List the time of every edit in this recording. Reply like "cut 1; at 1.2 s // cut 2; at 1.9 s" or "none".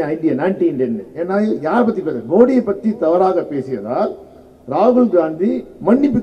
none